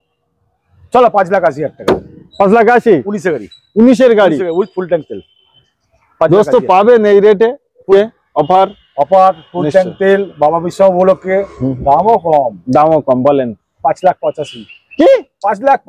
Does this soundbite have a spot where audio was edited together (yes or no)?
yes